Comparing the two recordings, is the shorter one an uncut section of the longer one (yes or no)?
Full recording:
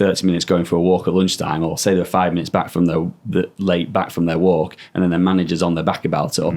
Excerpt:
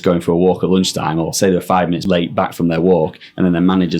no